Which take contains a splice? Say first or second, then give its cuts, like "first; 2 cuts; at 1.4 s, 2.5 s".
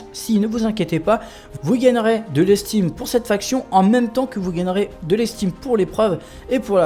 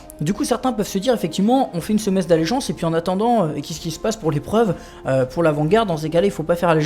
second; 1 cut; at 1.8 s